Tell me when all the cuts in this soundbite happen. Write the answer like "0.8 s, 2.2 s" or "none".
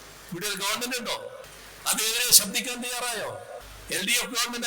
1.5 s, 3.7 s